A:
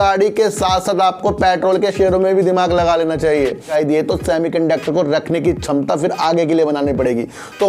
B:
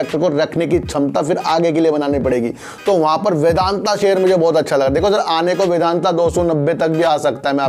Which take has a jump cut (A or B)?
A